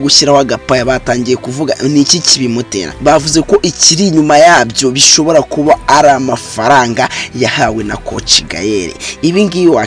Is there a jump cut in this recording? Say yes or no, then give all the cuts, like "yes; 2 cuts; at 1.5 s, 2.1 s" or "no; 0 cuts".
yes; 1 cut; at 2.8 s